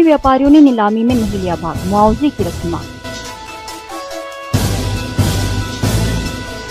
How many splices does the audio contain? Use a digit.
0